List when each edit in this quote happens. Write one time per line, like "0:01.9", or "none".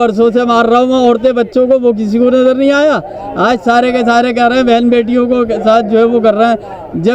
none